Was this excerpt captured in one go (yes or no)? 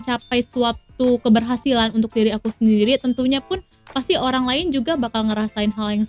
yes